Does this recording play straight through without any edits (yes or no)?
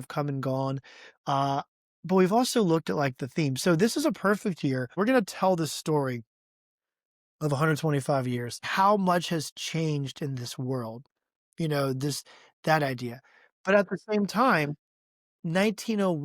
no